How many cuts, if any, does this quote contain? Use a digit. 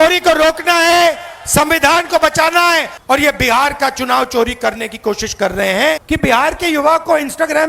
2